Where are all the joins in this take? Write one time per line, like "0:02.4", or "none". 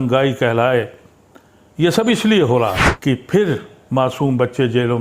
0:02.9